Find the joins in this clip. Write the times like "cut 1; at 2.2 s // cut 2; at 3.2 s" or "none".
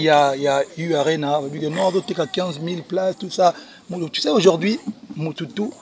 none